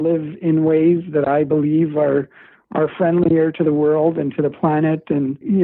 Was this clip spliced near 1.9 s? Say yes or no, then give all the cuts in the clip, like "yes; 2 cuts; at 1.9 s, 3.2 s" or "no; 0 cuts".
no; 0 cuts